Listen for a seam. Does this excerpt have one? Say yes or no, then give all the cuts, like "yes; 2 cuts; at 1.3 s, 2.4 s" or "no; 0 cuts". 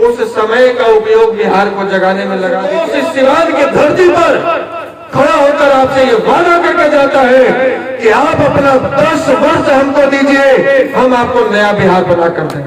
yes; 1 cut; at 2.6 s